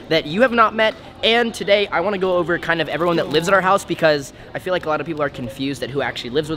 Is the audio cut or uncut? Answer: uncut